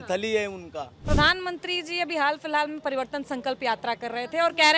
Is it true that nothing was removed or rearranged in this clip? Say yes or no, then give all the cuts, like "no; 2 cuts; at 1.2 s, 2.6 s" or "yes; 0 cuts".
no; 1 cut; at 0.9 s